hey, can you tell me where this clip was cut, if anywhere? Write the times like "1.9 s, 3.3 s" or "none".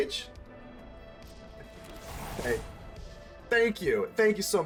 none